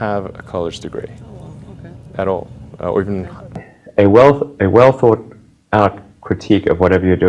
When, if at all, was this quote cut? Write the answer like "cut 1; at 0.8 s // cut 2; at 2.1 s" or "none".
cut 1; at 3.7 s